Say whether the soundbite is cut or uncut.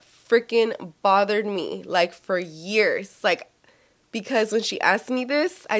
uncut